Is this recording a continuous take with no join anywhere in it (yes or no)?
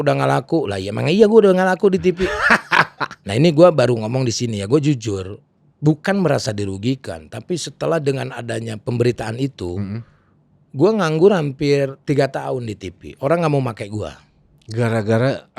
no